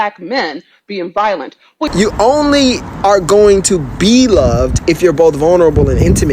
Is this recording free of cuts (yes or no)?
no